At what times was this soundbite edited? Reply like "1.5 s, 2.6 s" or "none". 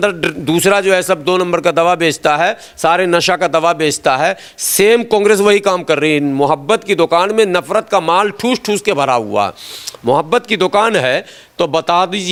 none